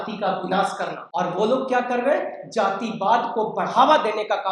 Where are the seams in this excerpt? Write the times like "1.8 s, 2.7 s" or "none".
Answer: 1.0 s